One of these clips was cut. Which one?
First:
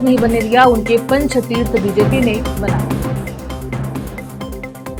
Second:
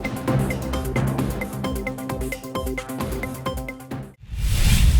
second; 1 cut; at 4.1 s

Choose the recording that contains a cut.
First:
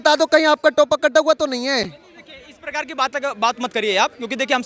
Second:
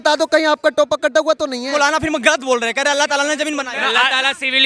second; 2 cuts; at 1.7 s, 3.8 s

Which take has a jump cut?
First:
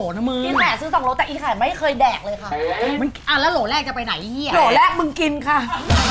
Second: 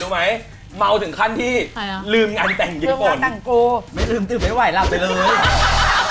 second; 1 cut; at 1.8 s

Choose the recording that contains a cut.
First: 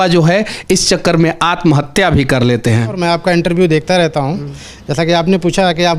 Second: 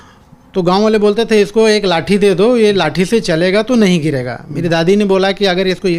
first; 1 cut; at 3.0 s

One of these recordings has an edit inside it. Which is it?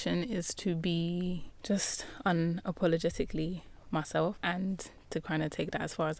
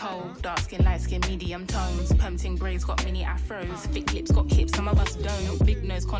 first; 2 cuts; at 1.5 s, 4.4 s

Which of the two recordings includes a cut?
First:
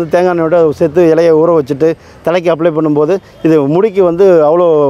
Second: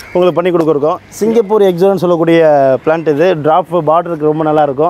second; 1 cut; at 1.1 s

